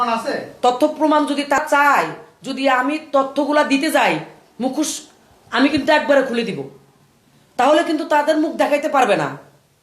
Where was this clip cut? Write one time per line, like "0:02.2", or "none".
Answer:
0:01.6